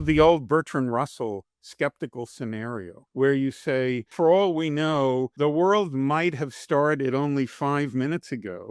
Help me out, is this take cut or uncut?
cut